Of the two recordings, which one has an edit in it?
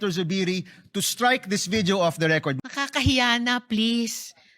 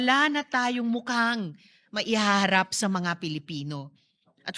first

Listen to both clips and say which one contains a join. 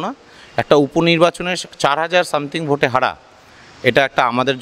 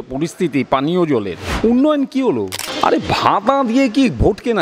second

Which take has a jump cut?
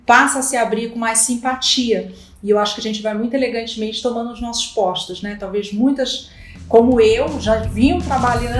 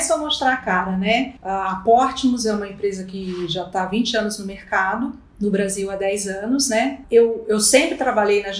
second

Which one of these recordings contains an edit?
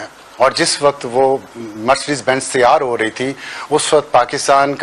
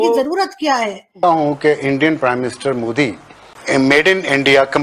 second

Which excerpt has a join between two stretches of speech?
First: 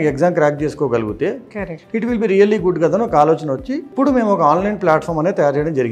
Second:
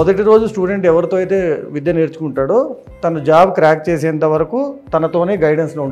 first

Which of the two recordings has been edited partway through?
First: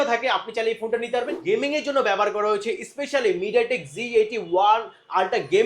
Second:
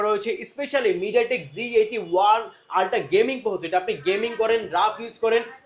first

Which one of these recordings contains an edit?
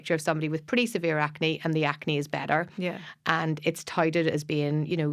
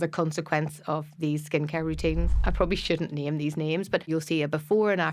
second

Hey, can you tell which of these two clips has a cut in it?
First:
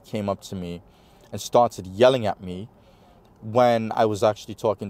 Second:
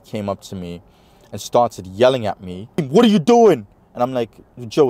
second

